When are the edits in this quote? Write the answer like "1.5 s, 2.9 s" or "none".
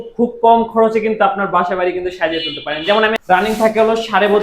3.4 s

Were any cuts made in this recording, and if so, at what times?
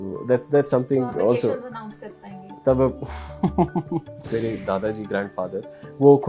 4.3 s

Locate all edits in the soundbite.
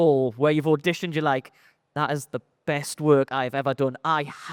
none

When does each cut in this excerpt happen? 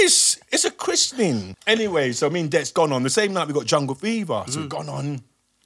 1.5 s

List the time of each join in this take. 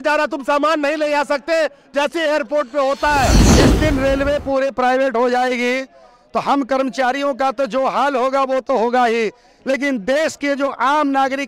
3.4 s

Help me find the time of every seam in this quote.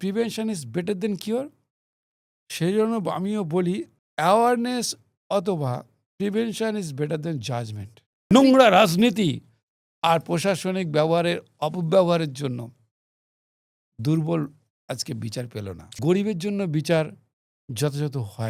4.0 s, 8.3 s, 15.9 s

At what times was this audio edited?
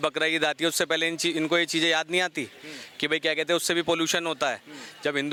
none

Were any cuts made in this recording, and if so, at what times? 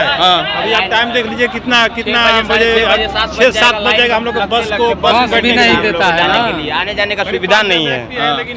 none

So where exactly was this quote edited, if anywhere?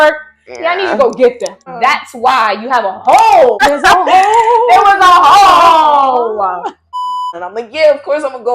1.6 s, 3.6 s, 7.0 s

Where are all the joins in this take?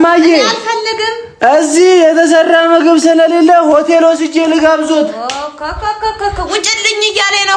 none

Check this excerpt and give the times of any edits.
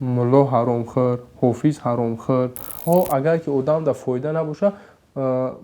2.7 s

